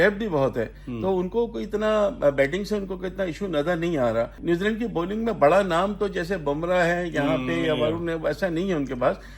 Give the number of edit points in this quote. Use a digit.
1